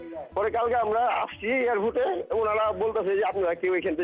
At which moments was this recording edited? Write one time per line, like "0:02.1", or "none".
0:02.3